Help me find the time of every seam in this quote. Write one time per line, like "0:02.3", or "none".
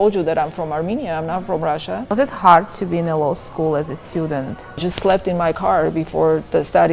0:02.1
0:04.9